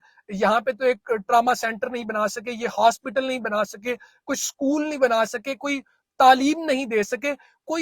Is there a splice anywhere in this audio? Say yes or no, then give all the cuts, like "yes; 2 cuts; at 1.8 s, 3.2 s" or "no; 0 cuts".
no; 0 cuts